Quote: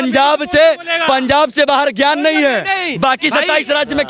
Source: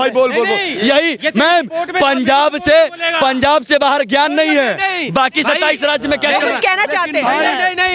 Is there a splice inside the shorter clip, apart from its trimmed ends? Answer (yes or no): no